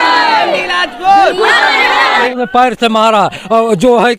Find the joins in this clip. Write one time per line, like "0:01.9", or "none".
0:02.3